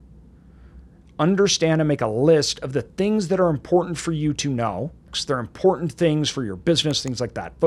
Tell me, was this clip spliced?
yes; 1 cut; at 5.1 s

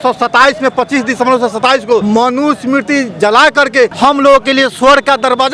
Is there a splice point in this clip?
yes; 2 cuts; at 2.0 s, 3.9 s

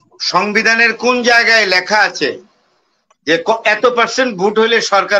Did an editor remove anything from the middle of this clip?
no; 0 cuts

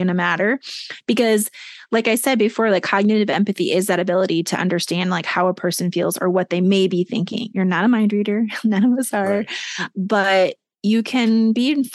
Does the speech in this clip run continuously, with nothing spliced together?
yes; 0 cuts

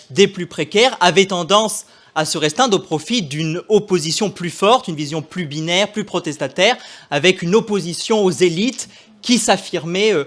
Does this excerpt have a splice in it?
no; 0 cuts

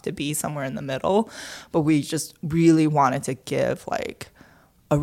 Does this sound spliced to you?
no; 0 cuts

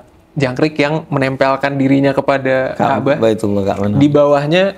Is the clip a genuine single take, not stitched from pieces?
yes; 0 cuts

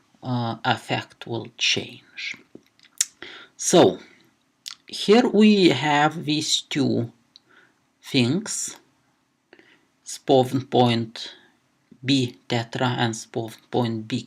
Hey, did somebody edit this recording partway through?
no; 0 cuts

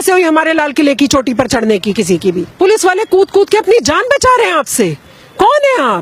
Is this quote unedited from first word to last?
no; 1 cut; at 2.5 s

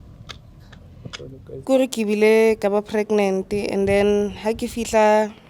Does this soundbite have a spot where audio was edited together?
yes; 1 cut; at 1.6 s

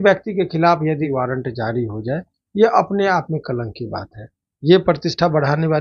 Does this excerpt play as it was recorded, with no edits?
no; 1 cut; at 1.1 s

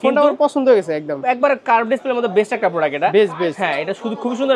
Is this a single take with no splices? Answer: yes; 0 cuts

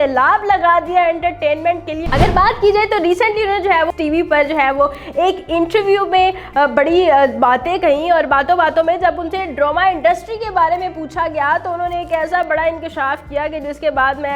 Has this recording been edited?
yes; 1 cut; at 2.0 s

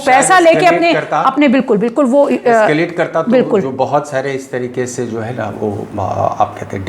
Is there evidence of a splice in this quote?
no; 0 cuts

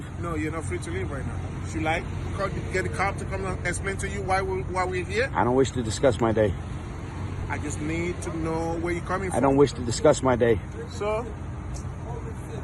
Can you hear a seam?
no; 0 cuts

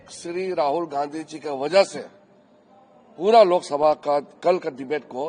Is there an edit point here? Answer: no; 0 cuts

